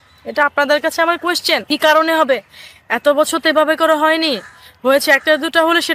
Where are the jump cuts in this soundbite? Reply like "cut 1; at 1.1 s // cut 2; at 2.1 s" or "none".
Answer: cut 1; at 1.6 s